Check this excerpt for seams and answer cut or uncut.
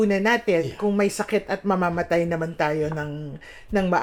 uncut